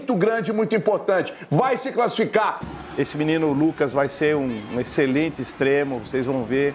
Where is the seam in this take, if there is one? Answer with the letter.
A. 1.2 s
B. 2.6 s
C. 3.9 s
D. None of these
B